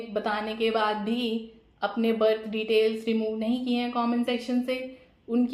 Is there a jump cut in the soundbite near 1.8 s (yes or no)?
no